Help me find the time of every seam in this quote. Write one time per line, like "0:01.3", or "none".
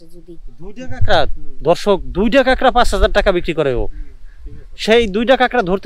none